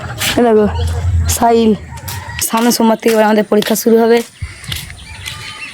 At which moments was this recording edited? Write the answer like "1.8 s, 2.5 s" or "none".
2.5 s